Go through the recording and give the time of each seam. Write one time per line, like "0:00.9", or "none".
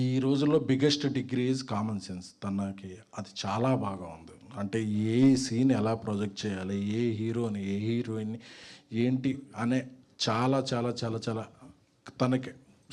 none